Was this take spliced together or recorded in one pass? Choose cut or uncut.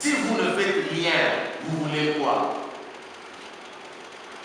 uncut